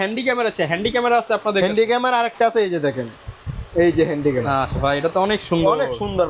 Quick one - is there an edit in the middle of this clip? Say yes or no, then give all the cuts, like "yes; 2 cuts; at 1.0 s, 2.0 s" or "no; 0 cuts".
no; 0 cuts